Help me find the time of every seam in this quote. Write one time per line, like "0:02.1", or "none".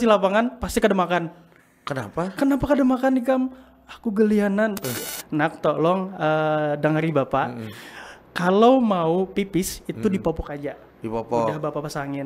0:05.0